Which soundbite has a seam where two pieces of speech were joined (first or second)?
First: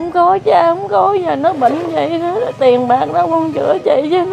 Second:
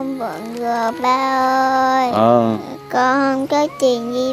second